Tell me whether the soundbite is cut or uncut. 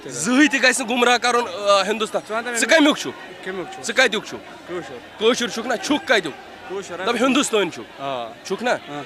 uncut